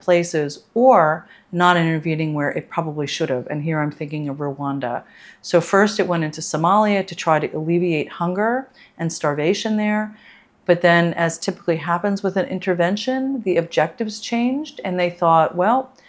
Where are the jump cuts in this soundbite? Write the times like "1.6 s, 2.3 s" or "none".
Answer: none